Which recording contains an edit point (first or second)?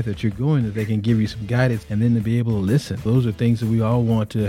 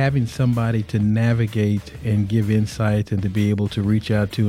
first